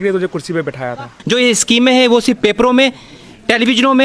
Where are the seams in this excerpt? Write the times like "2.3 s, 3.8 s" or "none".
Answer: 1.2 s